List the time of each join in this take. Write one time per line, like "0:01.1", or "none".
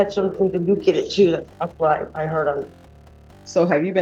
none